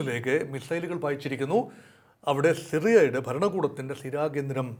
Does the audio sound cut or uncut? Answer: uncut